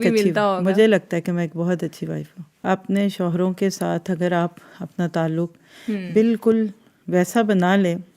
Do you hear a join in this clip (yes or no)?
yes